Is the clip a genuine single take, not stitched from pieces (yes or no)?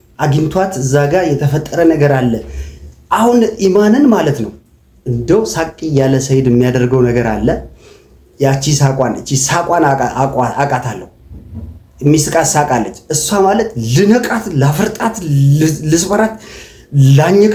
yes